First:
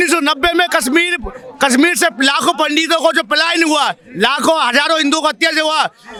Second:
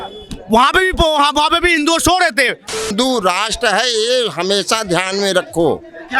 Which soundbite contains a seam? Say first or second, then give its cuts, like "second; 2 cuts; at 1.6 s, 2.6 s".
second; 1 cut; at 2.9 s